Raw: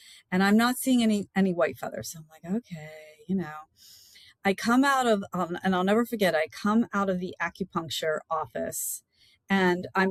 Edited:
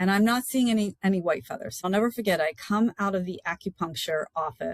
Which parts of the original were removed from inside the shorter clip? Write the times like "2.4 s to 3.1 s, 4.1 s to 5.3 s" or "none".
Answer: 2.2 s to 5.8 s